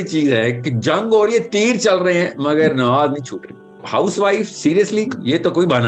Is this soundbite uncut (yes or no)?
no